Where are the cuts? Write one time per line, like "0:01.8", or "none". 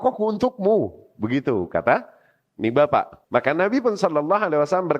0:03.2